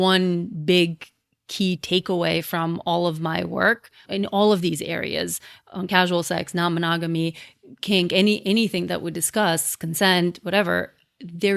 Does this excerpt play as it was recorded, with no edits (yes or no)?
no